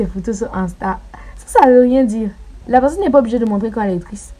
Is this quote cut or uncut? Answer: uncut